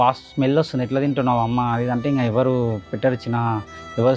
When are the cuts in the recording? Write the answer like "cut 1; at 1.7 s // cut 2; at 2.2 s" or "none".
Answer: none